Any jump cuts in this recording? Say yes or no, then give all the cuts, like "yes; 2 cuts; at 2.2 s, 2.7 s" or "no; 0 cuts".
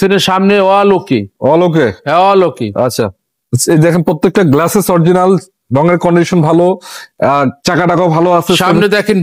no; 0 cuts